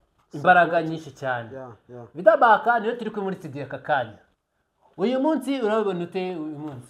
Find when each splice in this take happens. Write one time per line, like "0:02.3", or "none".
none